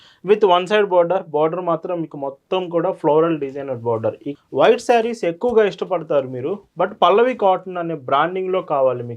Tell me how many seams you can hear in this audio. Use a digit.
1